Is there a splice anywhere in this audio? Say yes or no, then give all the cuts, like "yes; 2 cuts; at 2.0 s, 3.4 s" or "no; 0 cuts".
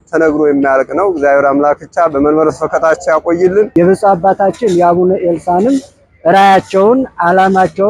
yes; 1 cut; at 3.7 s